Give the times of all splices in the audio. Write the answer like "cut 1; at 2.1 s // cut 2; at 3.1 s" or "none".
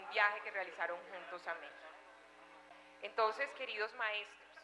cut 1; at 1.6 s